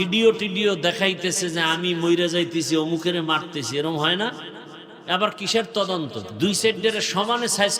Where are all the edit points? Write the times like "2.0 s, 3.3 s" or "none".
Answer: 6.2 s